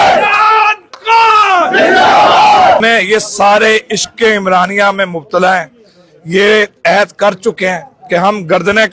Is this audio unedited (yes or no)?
no